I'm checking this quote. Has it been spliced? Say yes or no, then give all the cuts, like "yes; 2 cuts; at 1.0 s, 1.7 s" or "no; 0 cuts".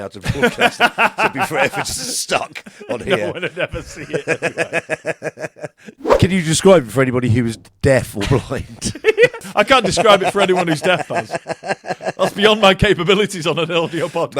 yes; 2 cuts; at 6.1 s, 9.5 s